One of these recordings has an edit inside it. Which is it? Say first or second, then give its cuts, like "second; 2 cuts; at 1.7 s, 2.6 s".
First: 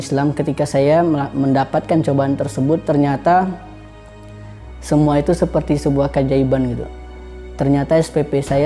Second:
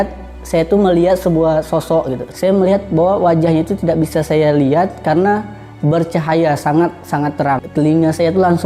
second; 2 cuts; at 2.2 s, 7.7 s